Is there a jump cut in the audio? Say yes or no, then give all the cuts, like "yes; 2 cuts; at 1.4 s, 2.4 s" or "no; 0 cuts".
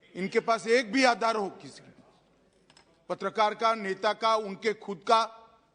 no; 0 cuts